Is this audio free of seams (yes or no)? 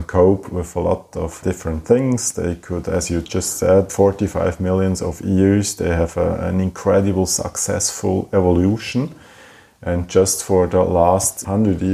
yes